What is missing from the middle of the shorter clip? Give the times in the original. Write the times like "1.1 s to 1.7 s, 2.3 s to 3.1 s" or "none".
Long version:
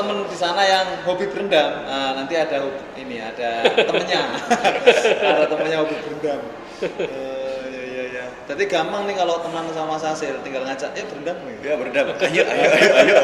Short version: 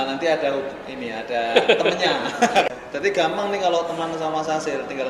4.8 s to 8.3 s